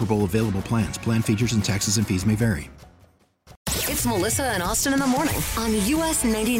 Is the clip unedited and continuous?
no; 1 cut; at 3.5 s

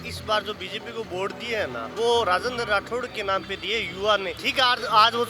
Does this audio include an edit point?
yes; 2 cuts; at 1.9 s, 4.4 s

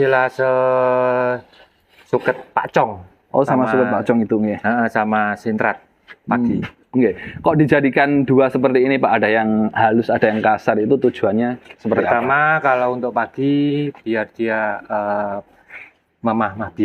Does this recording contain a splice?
no; 0 cuts

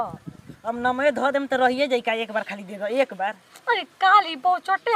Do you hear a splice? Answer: no; 0 cuts

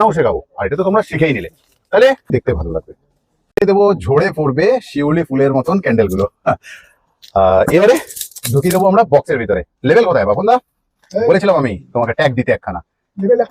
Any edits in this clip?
yes; 1 cut; at 2.3 s

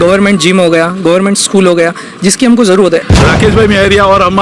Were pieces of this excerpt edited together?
yes; 1 cut; at 3.1 s

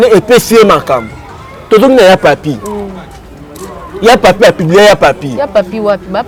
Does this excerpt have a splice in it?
no; 0 cuts

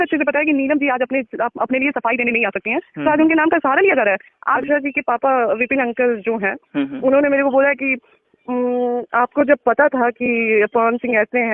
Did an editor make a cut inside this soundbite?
yes; 1 cut; at 4.6 s

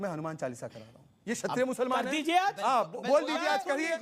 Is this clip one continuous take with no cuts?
yes; 0 cuts

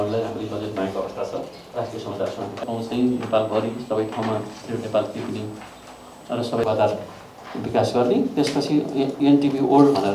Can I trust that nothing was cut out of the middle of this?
no; 1 cut; at 6.6 s

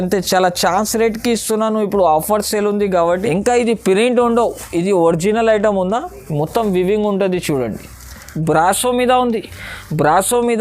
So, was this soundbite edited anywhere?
yes; 2 cuts; at 3.1 s, 8.3 s

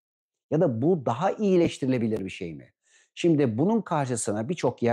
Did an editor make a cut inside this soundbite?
no; 0 cuts

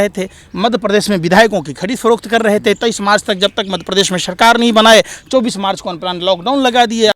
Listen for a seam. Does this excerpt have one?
no; 0 cuts

